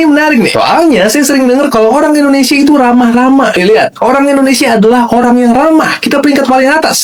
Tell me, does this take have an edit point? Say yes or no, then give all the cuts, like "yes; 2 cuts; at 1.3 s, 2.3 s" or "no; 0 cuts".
no; 0 cuts